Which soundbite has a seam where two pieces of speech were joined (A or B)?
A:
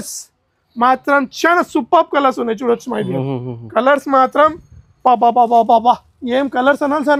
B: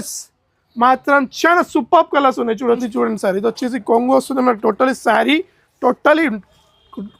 B